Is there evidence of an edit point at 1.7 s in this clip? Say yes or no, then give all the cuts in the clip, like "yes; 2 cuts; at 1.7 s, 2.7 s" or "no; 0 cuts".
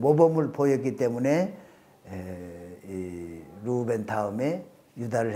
no; 0 cuts